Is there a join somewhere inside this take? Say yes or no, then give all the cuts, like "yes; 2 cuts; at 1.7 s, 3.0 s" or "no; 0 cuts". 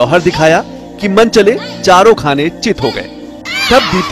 no; 0 cuts